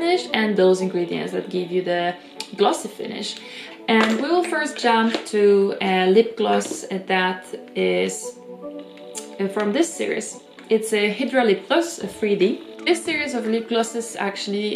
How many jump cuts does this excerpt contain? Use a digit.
0